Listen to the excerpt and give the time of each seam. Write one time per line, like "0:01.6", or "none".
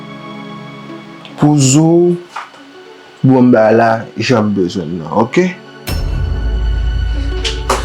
none